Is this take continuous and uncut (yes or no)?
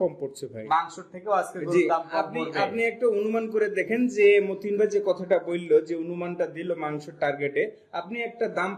yes